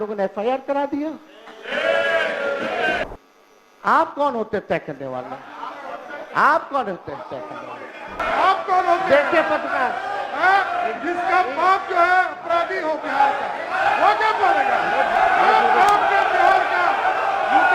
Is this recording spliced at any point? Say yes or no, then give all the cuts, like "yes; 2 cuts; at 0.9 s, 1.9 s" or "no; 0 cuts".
yes; 3 cuts; at 3.1 s, 8.2 s, 15.1 s